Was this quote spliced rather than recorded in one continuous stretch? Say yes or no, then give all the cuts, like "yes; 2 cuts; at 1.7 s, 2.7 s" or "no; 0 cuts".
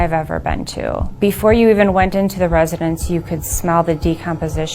yes; 1 cut; at 1.1 s